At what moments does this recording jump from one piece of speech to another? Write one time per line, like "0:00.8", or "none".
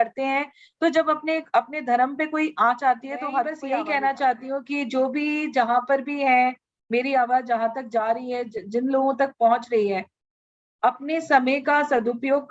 0:03.7